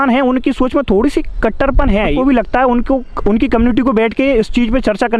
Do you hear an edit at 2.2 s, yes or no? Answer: yes